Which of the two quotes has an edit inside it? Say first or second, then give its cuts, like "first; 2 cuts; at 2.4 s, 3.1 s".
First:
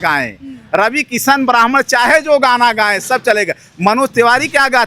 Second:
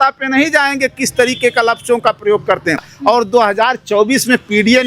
second; 1 cut; at 2.9 s